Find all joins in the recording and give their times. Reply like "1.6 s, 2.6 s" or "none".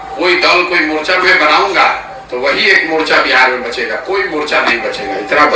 none